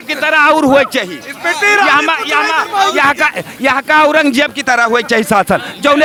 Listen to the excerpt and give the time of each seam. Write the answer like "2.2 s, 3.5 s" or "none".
none